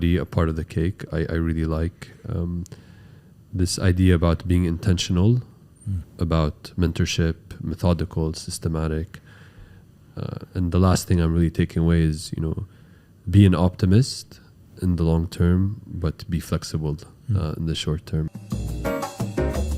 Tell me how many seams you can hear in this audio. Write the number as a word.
one